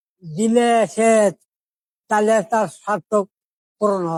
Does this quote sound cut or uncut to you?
uncut